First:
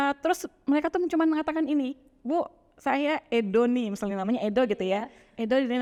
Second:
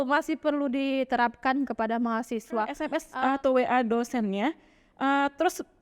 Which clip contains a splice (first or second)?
second